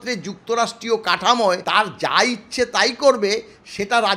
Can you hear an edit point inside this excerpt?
yes; 1 cut; at 1.6 s

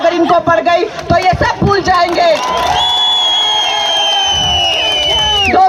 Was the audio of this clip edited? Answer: no; 0 cuts

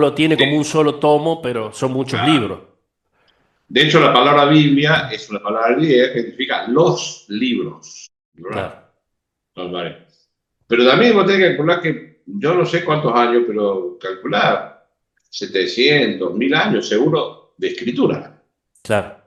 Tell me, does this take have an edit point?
no; 0 cuts

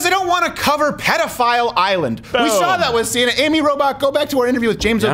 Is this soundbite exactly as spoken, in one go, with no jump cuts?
yes; 0 cuts

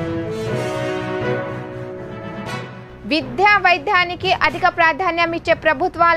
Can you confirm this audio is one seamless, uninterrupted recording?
yes; 0 cuts

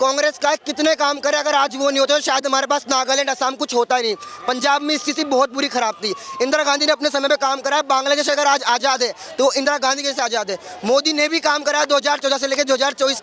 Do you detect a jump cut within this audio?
no; 0 cuts

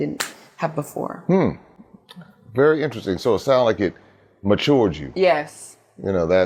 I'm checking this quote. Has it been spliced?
no; 0 cuts

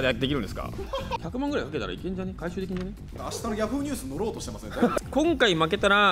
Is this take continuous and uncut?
no; 3 cuts; at 1.2 s, 3.1 s, 5.0 s

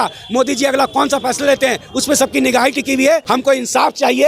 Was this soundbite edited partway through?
yes; 1 cut; at 3.4 s

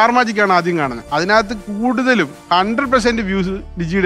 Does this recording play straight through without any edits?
no; 2 cuts; at 1.0 s, 2.4 s

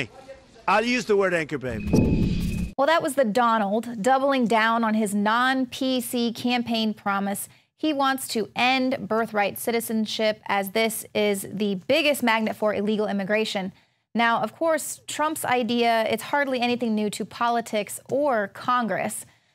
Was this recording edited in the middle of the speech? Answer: yes; 1 cut; at 9.7 s

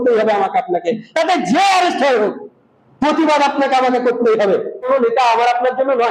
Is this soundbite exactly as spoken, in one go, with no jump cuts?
no; 1 cut; at 4.9 s

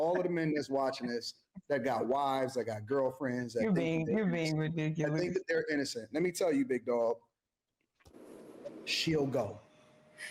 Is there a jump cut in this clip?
no; 0 cuts

